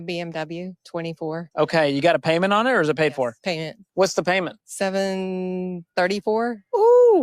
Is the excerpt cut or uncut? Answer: uncut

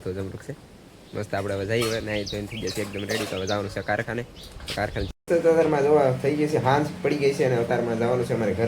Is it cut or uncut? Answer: cut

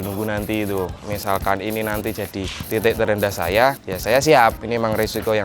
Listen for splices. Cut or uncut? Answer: cut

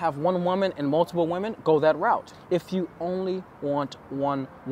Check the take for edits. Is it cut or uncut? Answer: cut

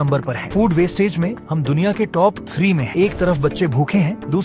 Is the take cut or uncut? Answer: uncut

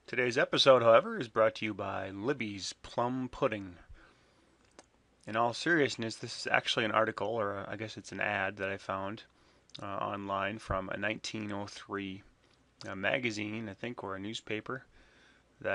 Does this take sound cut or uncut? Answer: uncut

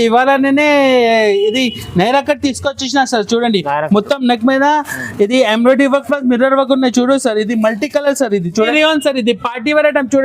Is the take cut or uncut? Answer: cut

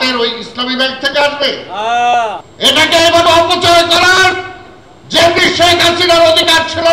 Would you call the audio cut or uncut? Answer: cut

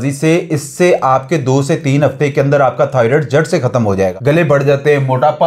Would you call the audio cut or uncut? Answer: cut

